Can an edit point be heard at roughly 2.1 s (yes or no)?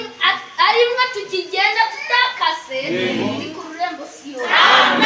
no